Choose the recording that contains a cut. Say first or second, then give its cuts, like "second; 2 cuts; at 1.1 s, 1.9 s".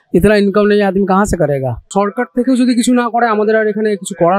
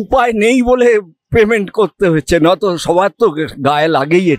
first; 1 cut; at 1.8 s